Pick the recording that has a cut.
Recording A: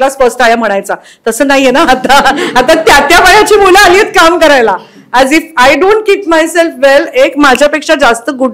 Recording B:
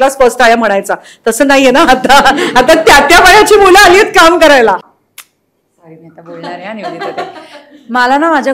B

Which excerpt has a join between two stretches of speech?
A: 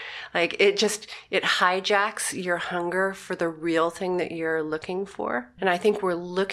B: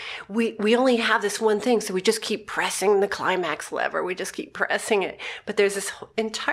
A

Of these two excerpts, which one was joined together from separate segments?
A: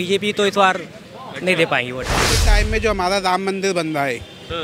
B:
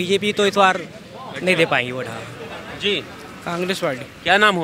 A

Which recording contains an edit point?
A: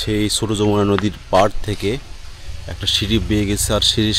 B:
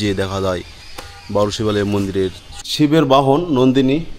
B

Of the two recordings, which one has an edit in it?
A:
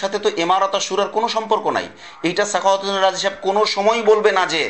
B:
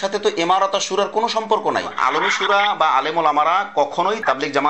B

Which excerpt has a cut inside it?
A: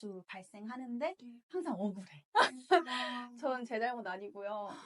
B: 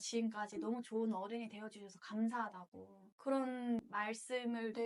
A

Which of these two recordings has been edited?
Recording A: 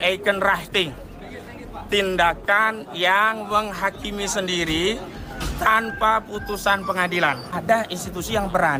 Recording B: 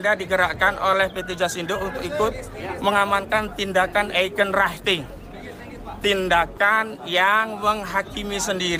A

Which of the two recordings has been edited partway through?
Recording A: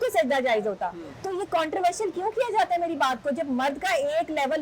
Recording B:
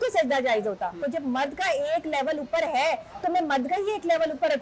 B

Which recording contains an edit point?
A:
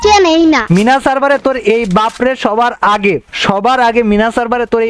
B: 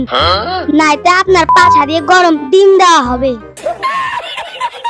B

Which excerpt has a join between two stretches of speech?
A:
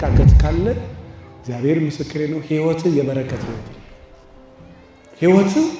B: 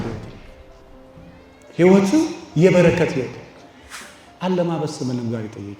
B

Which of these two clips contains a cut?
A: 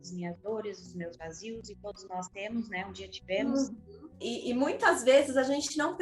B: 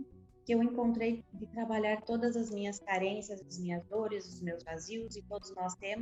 A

